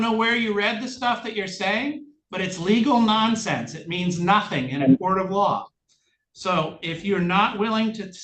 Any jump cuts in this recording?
no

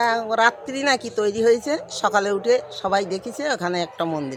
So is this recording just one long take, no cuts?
yes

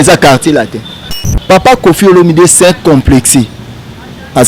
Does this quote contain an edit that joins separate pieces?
yes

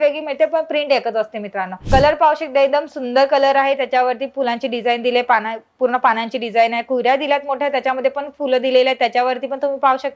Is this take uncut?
no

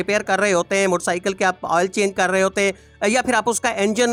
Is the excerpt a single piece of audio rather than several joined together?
yes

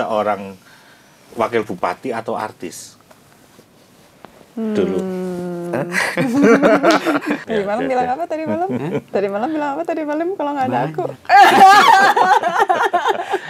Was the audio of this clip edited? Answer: yes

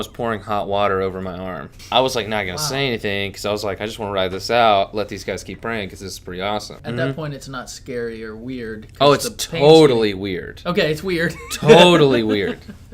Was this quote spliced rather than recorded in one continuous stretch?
yes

